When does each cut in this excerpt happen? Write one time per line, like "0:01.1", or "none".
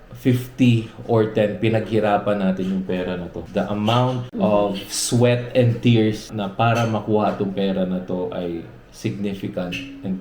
0:03.4
0:04.3
0:06.3